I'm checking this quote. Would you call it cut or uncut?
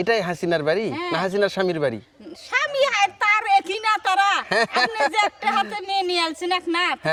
uncut